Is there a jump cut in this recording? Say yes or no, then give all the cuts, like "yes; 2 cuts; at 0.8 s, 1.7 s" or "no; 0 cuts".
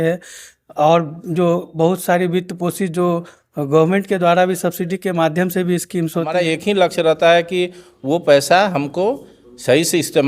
yes; 1 cut; at 6.3 s